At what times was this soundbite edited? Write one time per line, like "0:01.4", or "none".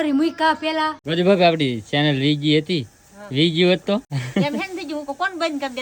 0:01.0
0:04.2